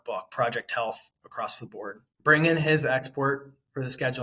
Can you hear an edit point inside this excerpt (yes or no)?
yes